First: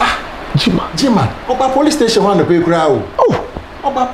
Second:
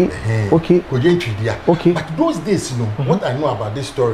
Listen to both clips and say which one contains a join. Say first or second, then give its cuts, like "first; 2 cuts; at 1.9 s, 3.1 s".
first; 2 cuts; at 1.4 s, 3.2 s